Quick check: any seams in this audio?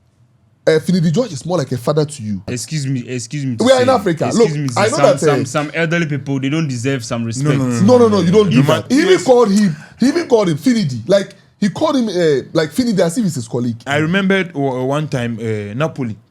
yes; 3 cuts; at 2.6 s, 8.8 s, 13.8 s

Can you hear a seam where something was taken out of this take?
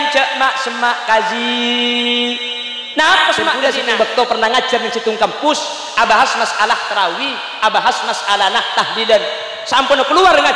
yes; 1 cut; at 3.6 s

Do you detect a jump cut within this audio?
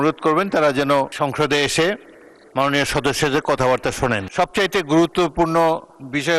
yes; 2 cuts; at 1.1 s, 4.3 s

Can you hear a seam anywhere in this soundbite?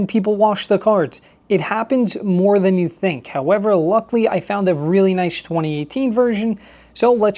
no; 0 cuts

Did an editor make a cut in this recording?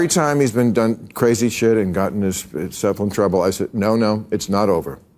no; 0 cuts

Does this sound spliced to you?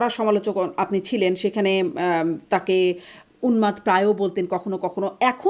no; 0 cuts

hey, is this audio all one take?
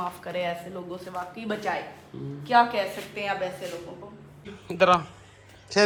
yes; 0 cuts

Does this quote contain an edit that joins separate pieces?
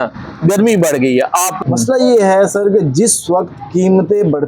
yes; 1 cut; at 1.6 s

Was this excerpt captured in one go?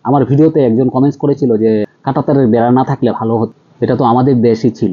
no; 2 cuts; at 2.0 s, 3.6 s

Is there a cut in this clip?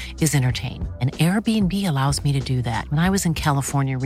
no; 0 cuts

